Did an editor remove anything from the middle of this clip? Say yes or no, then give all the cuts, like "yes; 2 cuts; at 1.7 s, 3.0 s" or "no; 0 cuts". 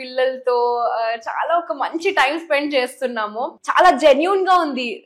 yes; 1 cut; at 3.5 s